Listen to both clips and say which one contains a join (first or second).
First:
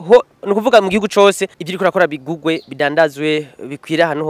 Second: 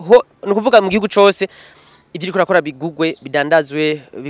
first